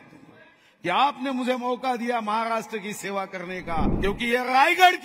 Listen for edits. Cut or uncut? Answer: cut